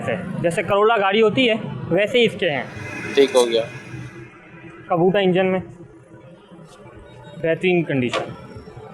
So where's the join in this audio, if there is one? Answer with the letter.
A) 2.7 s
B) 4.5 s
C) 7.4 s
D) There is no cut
D